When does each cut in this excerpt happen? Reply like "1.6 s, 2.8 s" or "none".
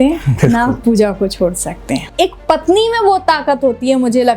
2.1 s